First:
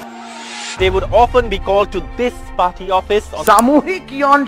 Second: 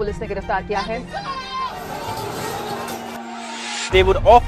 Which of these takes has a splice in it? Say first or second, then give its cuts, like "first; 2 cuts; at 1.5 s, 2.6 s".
second; 1 cut; at 1.5 s